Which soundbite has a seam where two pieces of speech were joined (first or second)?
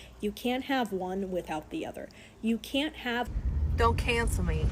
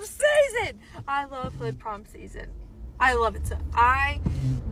first